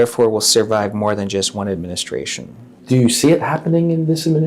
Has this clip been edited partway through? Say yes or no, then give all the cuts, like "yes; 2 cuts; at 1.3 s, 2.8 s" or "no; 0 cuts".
no; 0 cuts